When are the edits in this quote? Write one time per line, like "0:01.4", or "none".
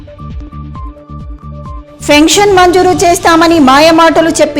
0:01.2